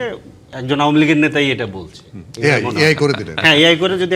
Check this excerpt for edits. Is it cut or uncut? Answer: uncut